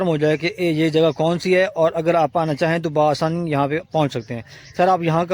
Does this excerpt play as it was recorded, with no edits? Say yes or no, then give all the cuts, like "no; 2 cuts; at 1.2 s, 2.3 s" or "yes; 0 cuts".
yes; 0 cuts